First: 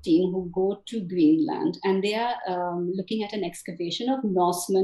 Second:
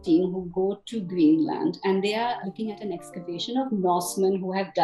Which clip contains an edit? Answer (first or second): second